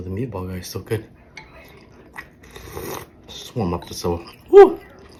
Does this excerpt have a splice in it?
no; 0 cuts

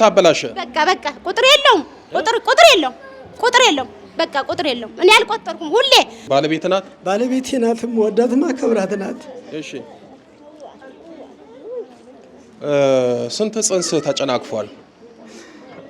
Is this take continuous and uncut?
no; 1 cut; at 6.2 s

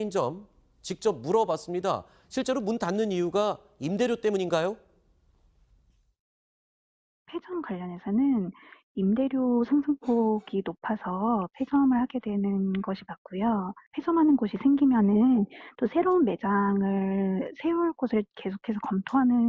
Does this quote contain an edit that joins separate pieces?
no; 0 cuts

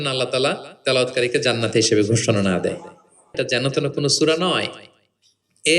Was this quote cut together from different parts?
yes; 1 cut; at 3.3 s

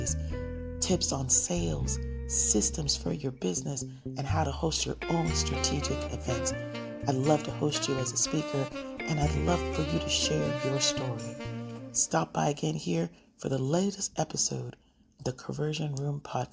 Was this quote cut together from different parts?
yes; 1 cut; at 15.2 s

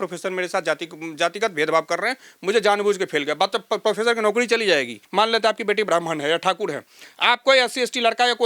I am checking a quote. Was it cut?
yes; 1 cut; at 5.0 s

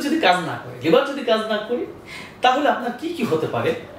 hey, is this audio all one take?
yes; 0 cuts

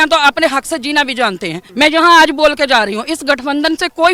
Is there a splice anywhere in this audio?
yes; 1 cut; at 1.6 s

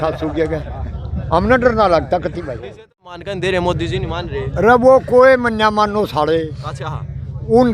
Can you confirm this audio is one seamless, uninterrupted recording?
no; 1 cut; at 3.2 s

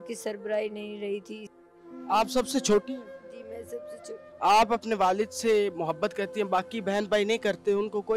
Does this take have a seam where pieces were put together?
yes; 1 cut; at 1.7 s

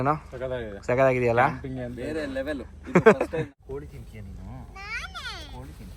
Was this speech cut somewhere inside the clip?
yes; 1 cut; at 3.5 s

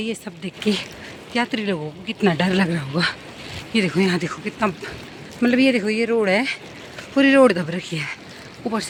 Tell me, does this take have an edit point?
no; 0 cuts

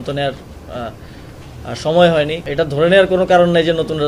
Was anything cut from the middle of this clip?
yes; 1 cut; at 2.4 s

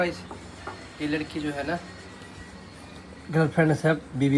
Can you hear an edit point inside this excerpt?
no; 0 cuts

